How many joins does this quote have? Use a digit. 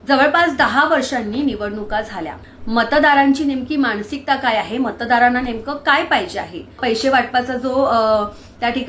2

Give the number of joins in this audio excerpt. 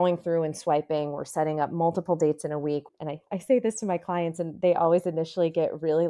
1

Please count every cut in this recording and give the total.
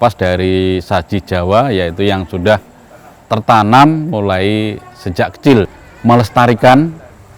1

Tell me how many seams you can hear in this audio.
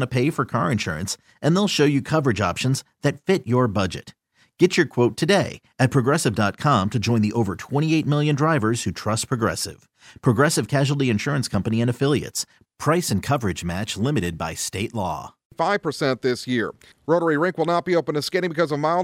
1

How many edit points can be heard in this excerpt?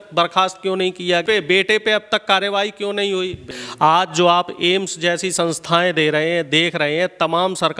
2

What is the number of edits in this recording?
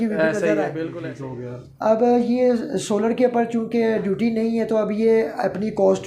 1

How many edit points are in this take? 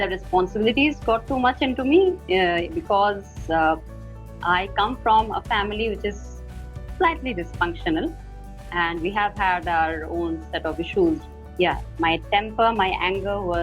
1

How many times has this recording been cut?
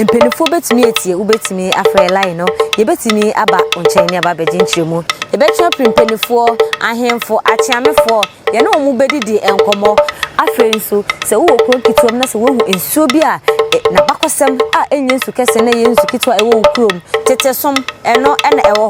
0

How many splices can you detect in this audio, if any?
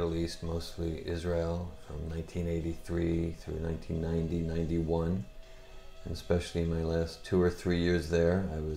0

